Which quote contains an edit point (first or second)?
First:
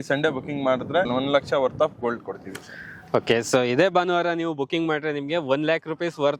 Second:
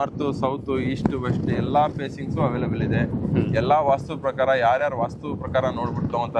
first